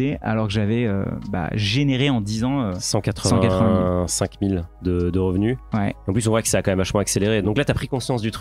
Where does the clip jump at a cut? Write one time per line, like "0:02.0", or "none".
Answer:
none